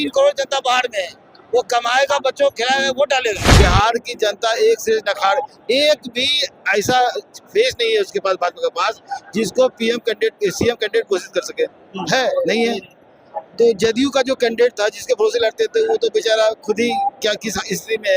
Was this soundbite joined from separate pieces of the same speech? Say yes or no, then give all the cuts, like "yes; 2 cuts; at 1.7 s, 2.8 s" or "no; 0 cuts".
yes; 1 cut; at 3.4 s